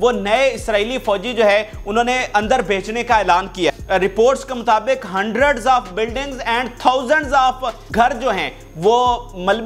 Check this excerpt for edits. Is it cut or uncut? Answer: cut